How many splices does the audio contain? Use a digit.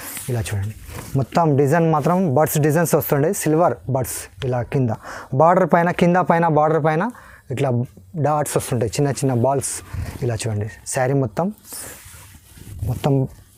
0